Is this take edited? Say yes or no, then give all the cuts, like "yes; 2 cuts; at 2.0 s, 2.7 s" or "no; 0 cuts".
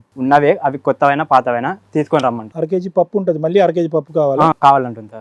no; 0 cuts